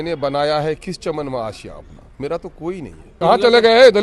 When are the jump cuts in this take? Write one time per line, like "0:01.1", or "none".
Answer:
0:03.1